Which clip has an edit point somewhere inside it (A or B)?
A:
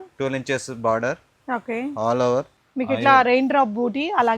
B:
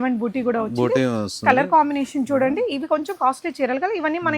A